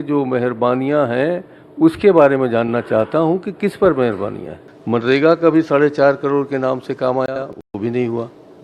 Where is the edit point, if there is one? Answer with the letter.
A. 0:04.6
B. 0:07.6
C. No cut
A